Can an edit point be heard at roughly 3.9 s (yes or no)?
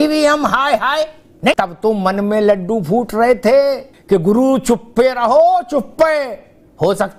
yes